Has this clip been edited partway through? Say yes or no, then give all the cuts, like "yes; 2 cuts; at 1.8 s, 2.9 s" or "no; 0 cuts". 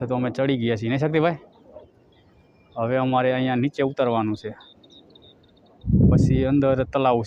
no; 0 cuts